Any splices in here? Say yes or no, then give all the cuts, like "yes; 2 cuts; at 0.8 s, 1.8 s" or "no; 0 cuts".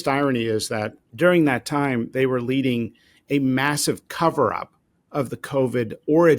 yes; 1 cut; at 1.0 s